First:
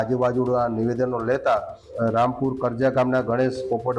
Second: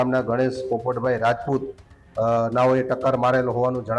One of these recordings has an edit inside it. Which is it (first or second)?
first